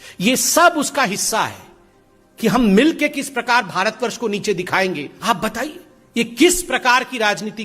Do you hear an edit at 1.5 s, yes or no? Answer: no